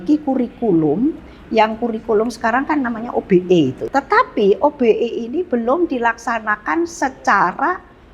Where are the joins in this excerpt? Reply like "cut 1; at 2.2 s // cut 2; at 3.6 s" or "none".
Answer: cut 1; at 3.8 s